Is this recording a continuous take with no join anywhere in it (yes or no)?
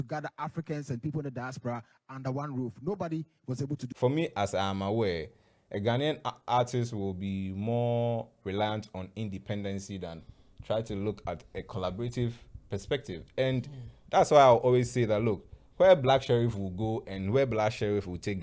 no